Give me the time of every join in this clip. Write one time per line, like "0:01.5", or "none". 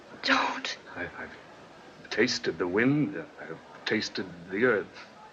0:03.7